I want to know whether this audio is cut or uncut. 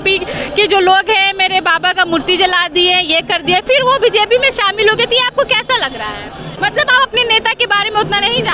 cut